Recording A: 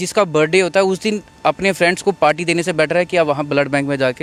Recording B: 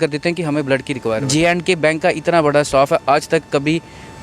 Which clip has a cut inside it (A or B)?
B